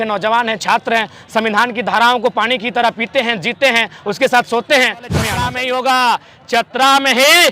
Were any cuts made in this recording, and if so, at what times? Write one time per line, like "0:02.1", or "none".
0:05.4